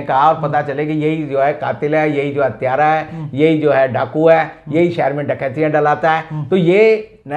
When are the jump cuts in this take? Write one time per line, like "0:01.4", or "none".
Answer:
none

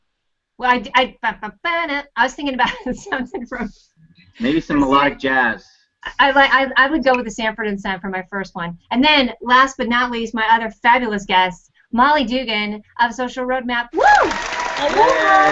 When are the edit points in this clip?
0:10.8

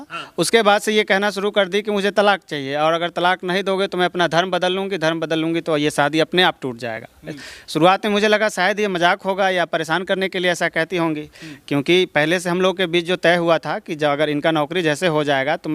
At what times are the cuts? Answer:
none

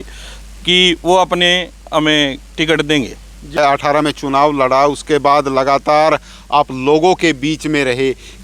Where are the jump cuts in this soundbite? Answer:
none

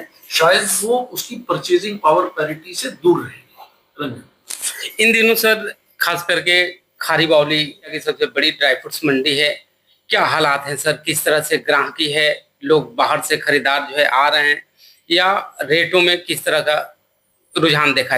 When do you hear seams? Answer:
none

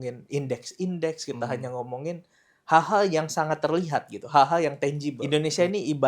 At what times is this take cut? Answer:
0:05.2

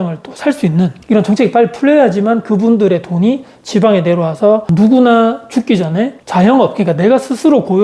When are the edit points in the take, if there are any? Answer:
0:04.7

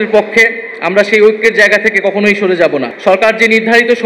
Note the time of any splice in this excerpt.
0:02.9

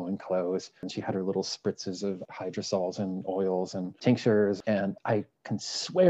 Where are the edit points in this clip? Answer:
0:00.9
0:02.2
0:03.9
0:04.8

